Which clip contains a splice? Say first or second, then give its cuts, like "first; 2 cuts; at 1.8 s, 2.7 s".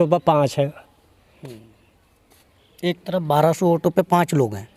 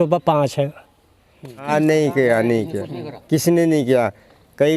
second; 1 cut; at 1.6 s